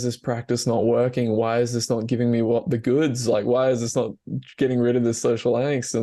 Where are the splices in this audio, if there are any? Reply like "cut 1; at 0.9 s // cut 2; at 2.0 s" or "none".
none